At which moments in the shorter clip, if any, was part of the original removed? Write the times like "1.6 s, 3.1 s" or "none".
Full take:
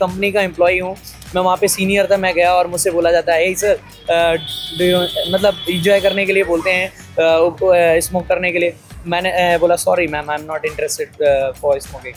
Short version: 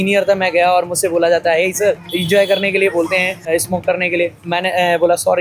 2.1 s, 3.5 s, 4.4 s